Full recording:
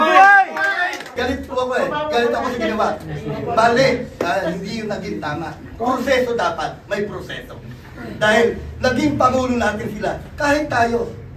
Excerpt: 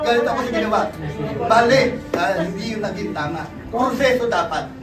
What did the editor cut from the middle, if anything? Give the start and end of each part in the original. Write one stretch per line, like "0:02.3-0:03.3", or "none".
none